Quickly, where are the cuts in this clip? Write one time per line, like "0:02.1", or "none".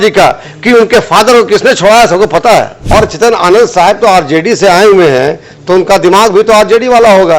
0:02.8